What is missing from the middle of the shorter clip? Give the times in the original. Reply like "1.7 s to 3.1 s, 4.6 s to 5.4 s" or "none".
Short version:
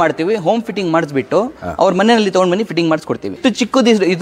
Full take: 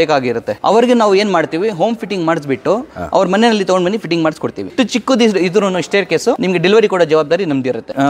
none